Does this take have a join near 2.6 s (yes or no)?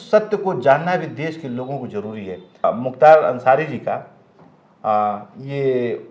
yes